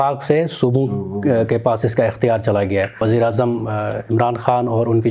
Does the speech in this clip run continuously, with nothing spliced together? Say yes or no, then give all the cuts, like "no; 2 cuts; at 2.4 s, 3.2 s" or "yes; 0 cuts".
no; 1 cut; at 3.0 s